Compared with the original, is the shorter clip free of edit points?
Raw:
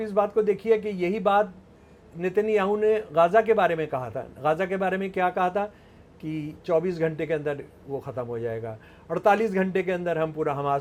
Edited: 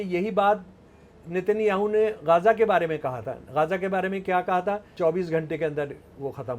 no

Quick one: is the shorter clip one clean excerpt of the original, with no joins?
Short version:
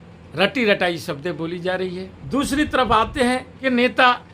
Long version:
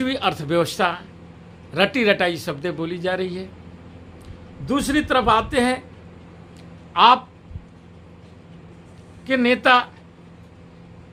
no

